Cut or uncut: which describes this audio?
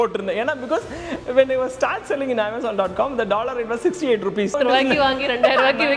cut